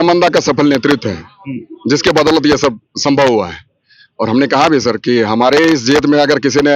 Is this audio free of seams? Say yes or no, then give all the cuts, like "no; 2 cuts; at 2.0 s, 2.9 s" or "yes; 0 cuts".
yes; 0 cuts